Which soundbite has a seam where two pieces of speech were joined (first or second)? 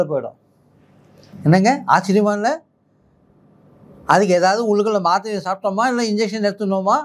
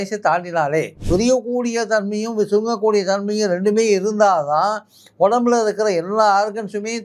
second